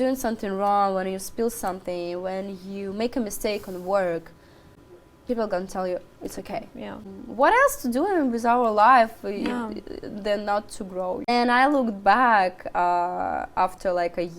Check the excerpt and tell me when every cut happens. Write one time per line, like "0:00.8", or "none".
0:04.7
0:07.1
0:11.2